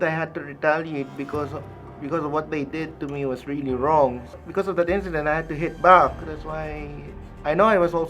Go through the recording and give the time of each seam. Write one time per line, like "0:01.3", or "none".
0:04.3